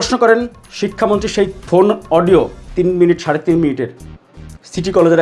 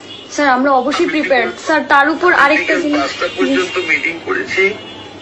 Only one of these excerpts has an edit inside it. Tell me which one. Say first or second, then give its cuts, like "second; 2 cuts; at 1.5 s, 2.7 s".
first; 2 cuts; at 1.6 s, 2.6 s